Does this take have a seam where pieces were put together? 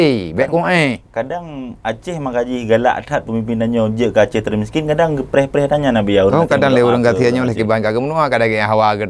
no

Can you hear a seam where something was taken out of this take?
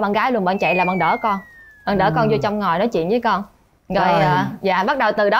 no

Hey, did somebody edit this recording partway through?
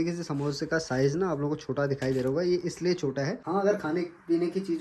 yes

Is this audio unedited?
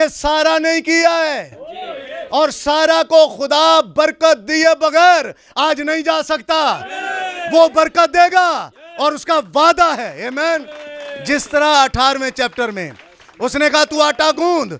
yes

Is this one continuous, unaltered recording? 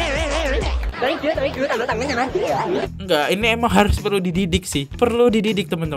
yes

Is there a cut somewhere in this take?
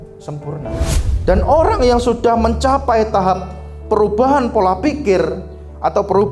yes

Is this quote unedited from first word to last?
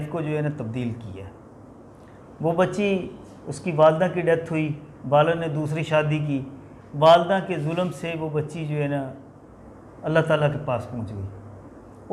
yes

